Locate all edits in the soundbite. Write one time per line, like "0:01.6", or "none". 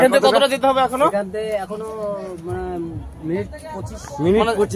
none